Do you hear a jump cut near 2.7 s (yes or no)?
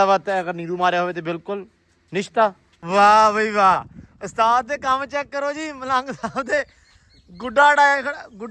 yes